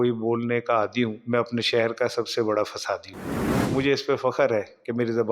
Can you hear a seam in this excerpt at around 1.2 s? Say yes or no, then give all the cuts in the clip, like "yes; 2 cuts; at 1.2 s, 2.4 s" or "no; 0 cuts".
yes; 2 cuts; at 1.2 s, 3.7 s